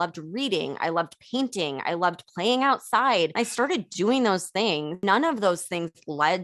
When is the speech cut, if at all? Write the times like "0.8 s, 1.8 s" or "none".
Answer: 3.3 s, 5.0 s